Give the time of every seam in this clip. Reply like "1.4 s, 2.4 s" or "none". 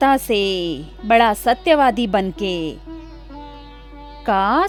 none